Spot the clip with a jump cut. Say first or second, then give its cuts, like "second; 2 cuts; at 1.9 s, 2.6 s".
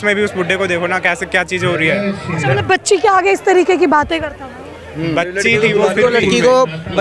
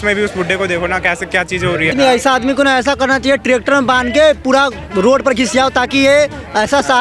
second; 1 cut; at 1.9 s